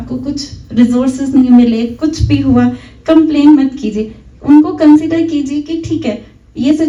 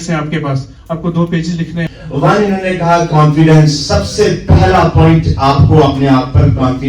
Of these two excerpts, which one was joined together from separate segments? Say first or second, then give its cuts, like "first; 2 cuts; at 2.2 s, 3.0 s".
second; 1 cut; at 1.9 s